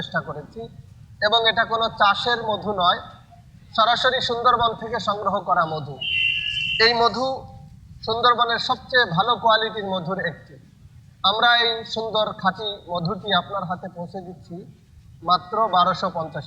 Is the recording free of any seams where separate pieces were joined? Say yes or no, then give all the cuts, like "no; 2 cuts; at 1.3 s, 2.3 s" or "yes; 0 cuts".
yes; 0 cuts